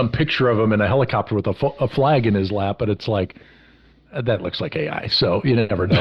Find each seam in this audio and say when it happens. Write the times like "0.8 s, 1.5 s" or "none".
none